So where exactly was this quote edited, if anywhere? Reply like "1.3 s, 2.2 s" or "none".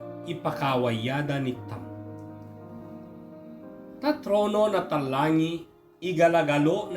none